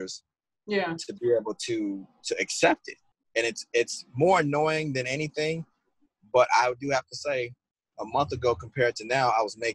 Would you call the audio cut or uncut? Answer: uncut